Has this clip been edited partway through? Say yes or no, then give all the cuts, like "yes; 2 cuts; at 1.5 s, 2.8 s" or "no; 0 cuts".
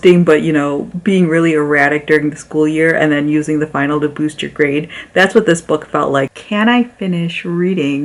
yes; 1 cut; at 6.3 s